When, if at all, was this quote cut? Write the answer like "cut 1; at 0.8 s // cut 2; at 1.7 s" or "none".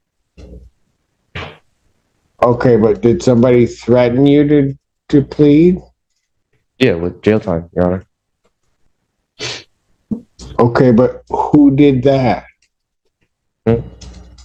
none